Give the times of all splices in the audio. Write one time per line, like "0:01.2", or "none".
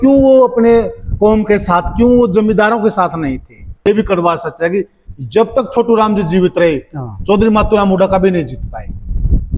0:03.8